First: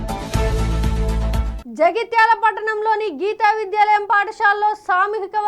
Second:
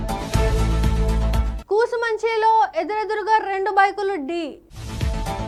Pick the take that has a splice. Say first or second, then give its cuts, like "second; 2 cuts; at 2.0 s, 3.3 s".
first; 1 cut; at 1.5 s